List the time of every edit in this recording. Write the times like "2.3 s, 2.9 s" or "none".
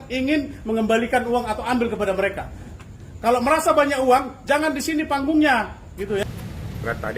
2.6 s, 6.2 s